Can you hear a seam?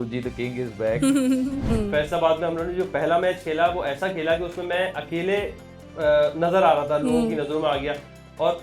yes; 1 cut; at 1.7 s

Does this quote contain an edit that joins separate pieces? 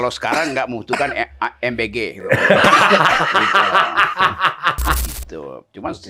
yes; 1 cut; at 5.0 s

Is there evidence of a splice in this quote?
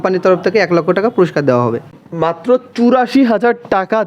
yes; 1 cut; at 1.9 s

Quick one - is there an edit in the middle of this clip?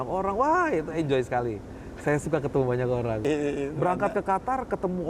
yes; 1 cut; at 3.2 s

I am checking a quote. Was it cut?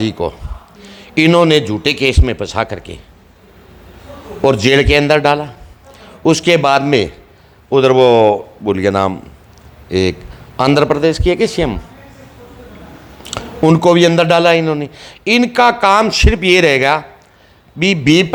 no; 0 cuts

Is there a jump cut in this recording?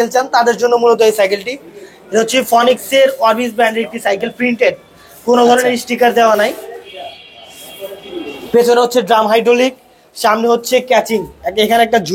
no; 0 cuts

